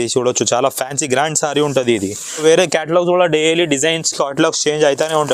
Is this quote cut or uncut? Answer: cut